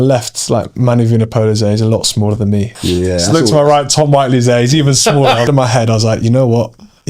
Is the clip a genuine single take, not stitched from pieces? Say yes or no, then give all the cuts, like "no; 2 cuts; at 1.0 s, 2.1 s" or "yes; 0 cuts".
no; 2 cuts; at 2.7 s, 5.5 s